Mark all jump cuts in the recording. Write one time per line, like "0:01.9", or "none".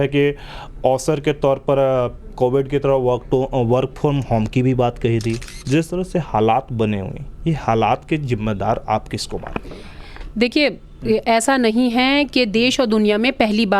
0:05.5